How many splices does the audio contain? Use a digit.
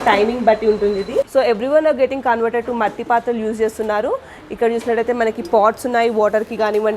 1